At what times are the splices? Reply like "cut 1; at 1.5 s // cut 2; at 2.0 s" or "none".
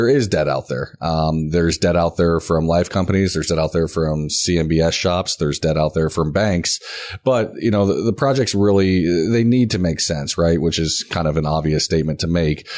none